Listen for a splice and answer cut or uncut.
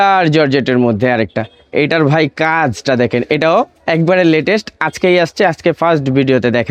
uncut